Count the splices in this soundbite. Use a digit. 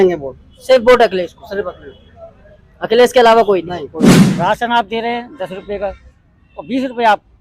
1